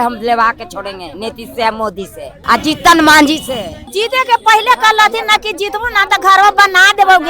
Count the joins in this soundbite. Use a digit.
2